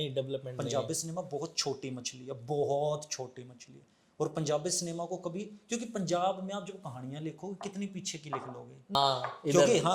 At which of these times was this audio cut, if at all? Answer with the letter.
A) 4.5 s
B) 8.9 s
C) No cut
B